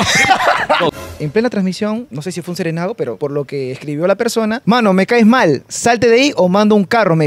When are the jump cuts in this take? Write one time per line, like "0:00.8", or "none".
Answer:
0:00.9
0:02.1
0:03.2
0:04.6